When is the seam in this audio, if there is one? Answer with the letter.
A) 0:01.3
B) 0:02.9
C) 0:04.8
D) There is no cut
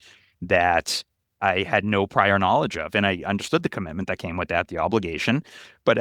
A